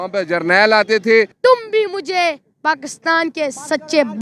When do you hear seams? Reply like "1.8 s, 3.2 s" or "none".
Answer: 1.3 s